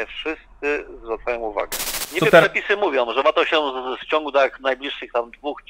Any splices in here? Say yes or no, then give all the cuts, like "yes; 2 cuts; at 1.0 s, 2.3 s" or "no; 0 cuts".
yes; 1 cut; at 2.0 s